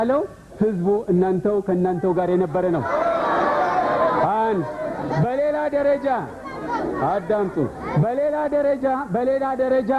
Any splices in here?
no; 0 cuts

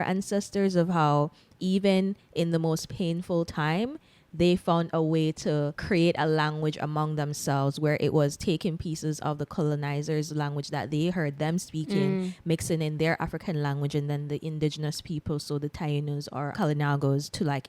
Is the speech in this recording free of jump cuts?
no; 2 cuts; at 5.8 s, 16.5 s

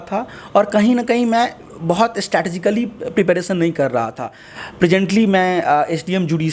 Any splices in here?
yes; 1 cut; at 4.4 s

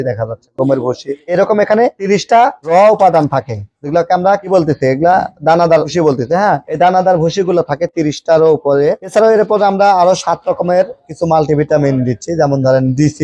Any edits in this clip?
no; 0 cuts

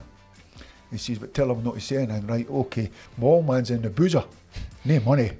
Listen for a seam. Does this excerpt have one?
yes; 1 cut; at 3.0 s

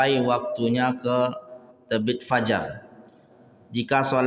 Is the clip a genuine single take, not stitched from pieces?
yes; 0 cuts

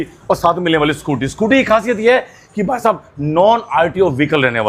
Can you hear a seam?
no; 0 cuts

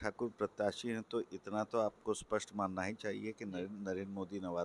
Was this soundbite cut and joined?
no; 0 cuts

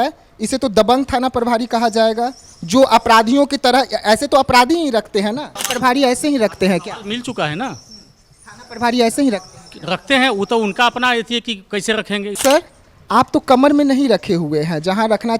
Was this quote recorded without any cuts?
no; 2 cuts; at 5.6 s, 12.4 s

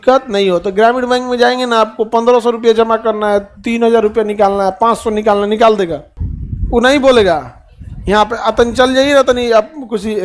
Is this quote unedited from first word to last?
yes; 0 cuts

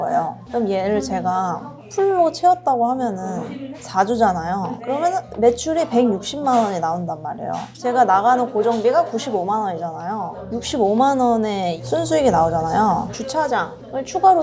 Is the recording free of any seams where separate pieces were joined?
yes; 0 cuts

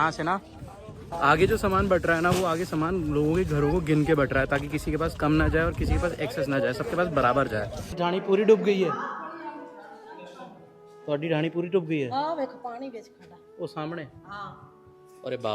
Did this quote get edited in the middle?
yes; 1 cut; at 8.0 s

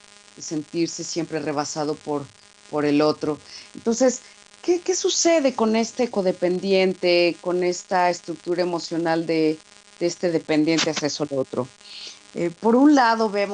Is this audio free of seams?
yes; 0 cuts

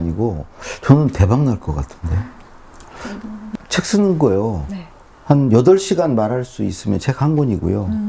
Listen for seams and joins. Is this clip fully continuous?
no; 1 cut; at 3.5 s

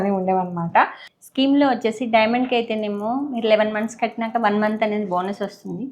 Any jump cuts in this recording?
yes; 1 cut; at 1.0 s

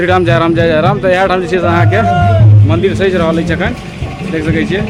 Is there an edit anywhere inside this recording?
no; 0 cuts

